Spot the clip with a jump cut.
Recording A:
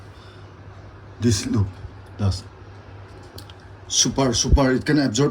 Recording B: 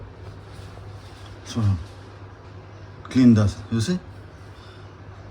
A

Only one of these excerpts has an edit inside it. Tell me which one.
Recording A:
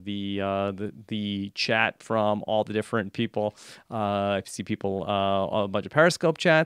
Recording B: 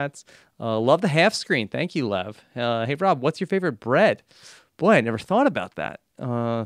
A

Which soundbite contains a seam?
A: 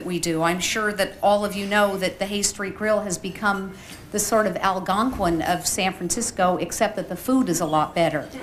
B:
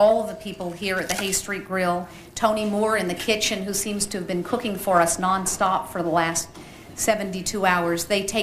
B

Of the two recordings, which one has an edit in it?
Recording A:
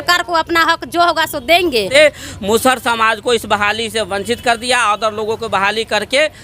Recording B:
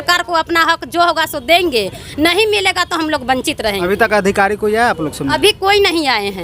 A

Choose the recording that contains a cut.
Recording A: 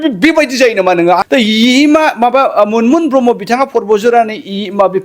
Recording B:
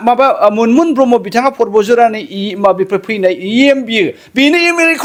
A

